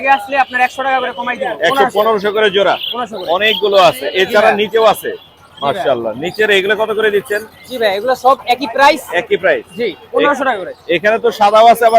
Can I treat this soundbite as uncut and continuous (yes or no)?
yes